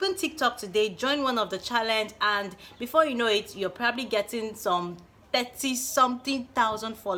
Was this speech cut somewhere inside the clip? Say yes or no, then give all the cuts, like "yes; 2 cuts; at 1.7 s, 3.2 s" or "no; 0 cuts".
no; 0 cuts